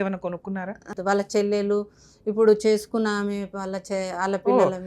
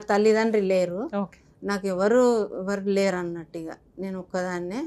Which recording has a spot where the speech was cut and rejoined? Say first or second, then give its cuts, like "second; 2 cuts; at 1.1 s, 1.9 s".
first; 1 cut; at 0.9 s